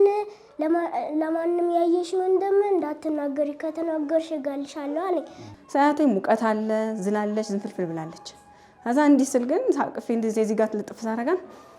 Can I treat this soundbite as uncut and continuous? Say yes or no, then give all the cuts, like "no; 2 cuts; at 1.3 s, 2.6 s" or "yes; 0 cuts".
no; 1 cut; at 5.4 s